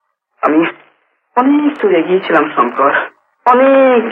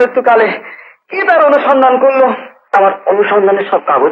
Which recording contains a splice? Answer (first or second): second